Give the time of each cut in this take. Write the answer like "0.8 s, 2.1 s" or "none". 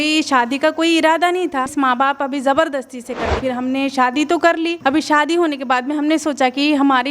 1.7 s, 3.4 s